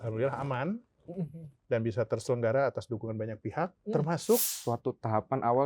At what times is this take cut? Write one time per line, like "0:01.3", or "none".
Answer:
0:04.5